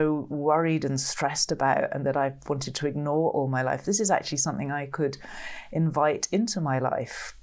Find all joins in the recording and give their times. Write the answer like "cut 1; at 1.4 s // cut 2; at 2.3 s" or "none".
none